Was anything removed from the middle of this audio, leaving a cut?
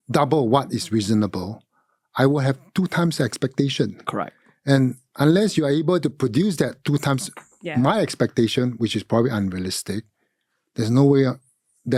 no; 0 cuts

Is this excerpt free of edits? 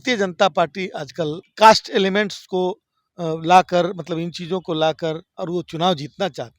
no; 1 cut; at 1.4 s

